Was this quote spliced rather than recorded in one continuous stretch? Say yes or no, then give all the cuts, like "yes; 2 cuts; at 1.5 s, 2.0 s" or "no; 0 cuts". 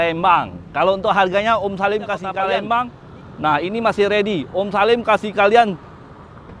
yes; 1 cut; at 2.3 s